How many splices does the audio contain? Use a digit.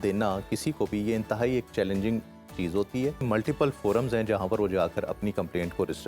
1